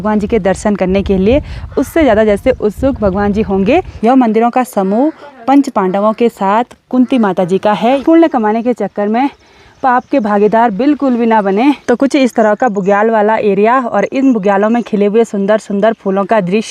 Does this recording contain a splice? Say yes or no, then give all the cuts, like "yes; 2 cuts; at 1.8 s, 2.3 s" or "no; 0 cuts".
yes; 3 cuts; at 3.9 s, 8.0 s, 11.8 s